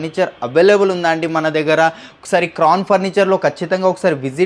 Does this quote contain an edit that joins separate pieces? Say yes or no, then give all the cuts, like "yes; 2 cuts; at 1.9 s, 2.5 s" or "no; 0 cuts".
no; 0 cuts